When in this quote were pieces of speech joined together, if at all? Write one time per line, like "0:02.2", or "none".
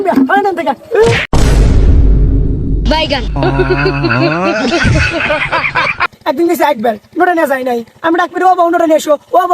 0:06.1